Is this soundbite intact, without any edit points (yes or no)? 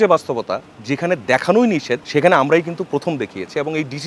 yes